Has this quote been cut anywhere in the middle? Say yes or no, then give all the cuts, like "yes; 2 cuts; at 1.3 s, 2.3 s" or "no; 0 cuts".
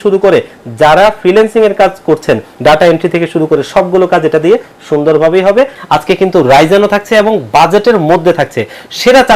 yes; 2 cuts; at 2.5 s, 5.8 s